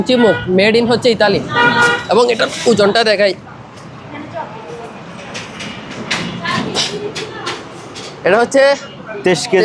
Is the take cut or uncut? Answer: uncut